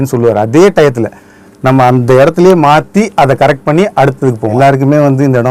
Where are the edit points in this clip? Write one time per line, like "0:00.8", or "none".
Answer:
0:04.5

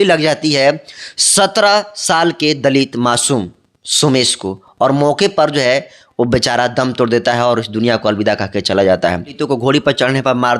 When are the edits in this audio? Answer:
0:09.3

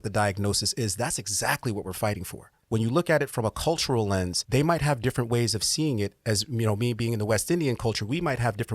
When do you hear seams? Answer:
0:02.5
0:04.4

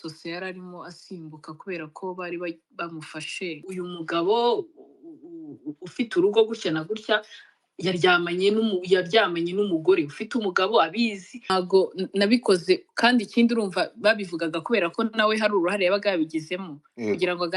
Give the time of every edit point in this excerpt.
0:03.7
0:11.5

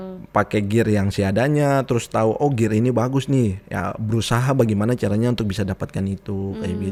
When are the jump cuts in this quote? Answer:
none

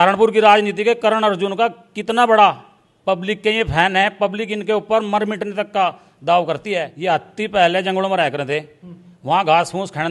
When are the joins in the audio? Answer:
0:06.9

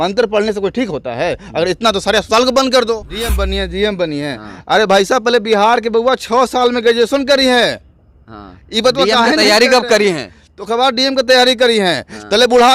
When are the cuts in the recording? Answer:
0:03.4

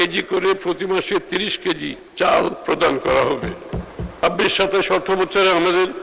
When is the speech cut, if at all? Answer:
0:02.0
0:04.2

